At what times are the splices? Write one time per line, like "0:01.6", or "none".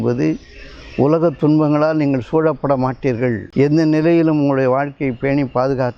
0:03.4